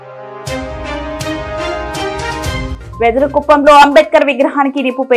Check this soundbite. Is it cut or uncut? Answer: cut